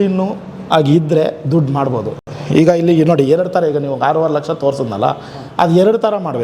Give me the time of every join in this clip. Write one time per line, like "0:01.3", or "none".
none